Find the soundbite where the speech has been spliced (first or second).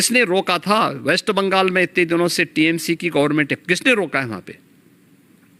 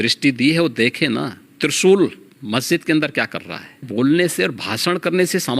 second